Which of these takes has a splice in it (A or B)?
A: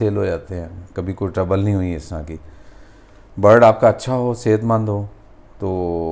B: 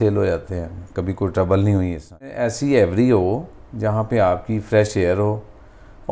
B